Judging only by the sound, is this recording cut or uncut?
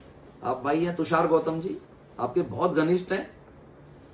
uncut